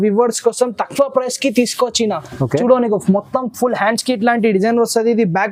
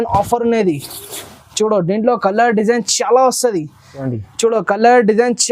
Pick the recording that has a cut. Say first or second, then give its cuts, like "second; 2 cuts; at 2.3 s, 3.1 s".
second; 1 cut; at 4.0 s